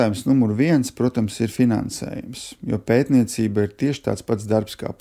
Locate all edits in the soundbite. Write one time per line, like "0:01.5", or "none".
none